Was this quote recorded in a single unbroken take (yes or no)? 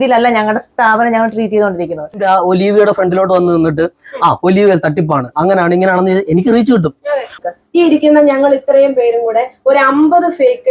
no